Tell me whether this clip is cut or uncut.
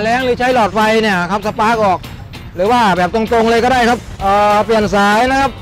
cut